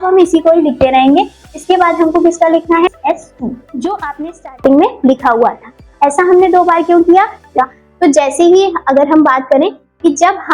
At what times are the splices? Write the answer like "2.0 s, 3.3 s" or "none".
2.9 s, 7.6 s